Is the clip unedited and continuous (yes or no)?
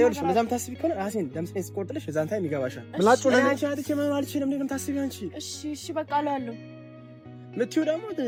yes